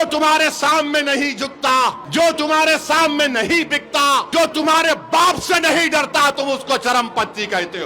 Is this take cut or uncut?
cut